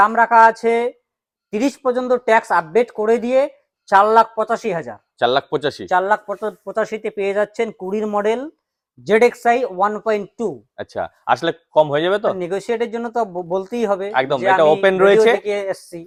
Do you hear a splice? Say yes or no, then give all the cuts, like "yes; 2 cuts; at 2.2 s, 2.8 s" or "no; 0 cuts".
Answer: no; 0 cuts